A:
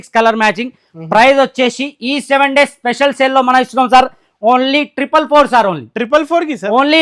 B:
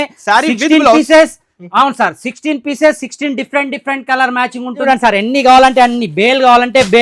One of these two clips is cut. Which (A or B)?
B